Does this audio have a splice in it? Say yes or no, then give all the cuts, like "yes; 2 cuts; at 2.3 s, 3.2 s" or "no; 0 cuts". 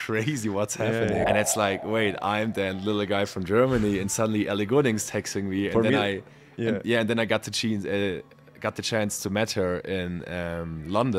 yes; 1 cut; at 1.2 s